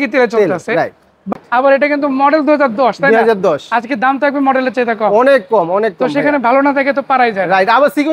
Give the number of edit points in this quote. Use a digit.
1